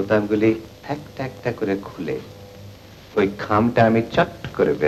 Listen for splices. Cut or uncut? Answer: uncut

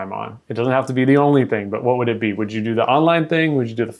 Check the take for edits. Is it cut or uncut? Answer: uncut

